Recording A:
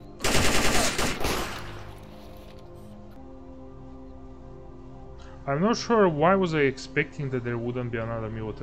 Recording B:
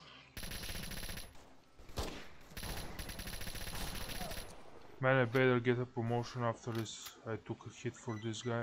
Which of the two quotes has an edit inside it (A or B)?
A